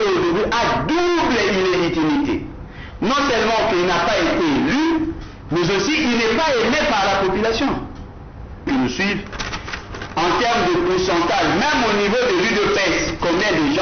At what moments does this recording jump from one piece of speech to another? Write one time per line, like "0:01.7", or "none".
0:08.7